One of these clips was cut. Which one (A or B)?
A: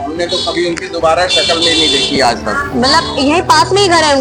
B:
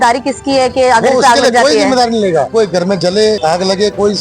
B